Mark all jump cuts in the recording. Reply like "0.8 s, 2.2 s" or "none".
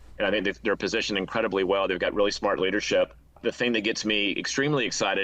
3.4 s